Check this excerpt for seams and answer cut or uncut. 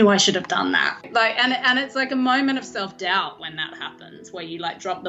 cut